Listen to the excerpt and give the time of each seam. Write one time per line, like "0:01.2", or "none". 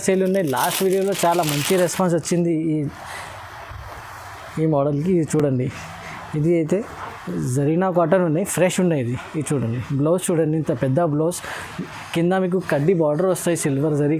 none